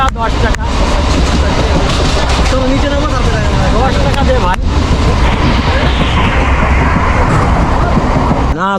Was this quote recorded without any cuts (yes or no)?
yes